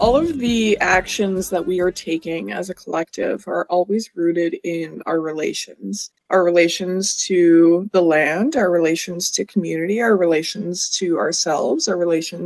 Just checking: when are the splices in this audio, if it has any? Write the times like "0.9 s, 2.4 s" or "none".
none